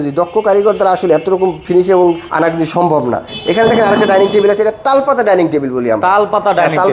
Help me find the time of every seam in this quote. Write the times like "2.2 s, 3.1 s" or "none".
2.3 s, 3.3 s